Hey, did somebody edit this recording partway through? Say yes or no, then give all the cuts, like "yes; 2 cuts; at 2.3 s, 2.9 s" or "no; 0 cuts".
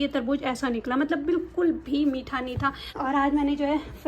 yes; 1 cut; at 2.9 s